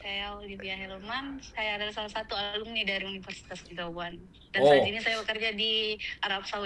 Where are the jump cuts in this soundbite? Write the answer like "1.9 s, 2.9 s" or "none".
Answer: none